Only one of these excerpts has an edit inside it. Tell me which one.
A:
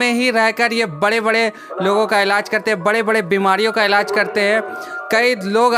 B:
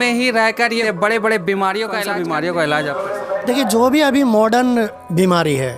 B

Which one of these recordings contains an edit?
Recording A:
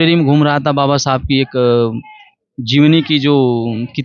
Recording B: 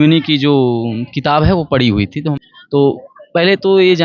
B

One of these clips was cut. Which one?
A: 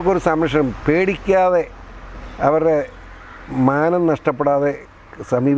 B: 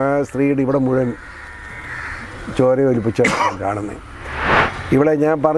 B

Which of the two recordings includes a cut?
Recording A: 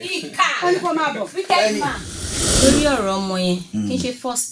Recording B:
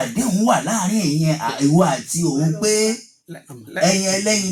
A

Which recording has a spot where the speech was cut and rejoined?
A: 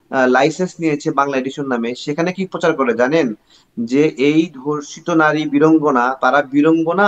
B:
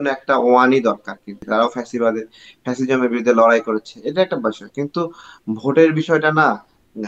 B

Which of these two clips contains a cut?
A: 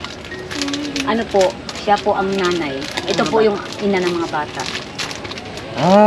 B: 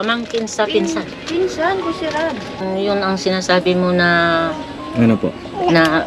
B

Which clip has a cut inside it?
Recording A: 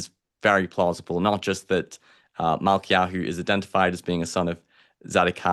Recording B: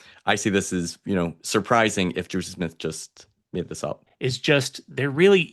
B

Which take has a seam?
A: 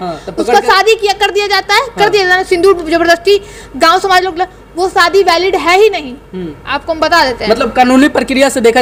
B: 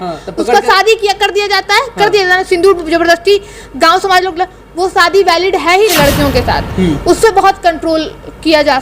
B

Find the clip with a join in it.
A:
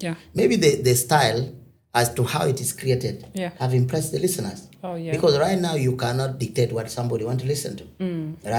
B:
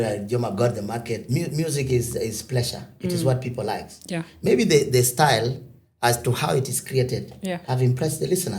B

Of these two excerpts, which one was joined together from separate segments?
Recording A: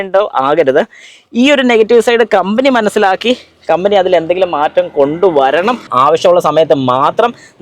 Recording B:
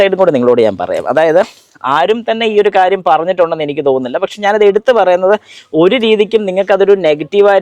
A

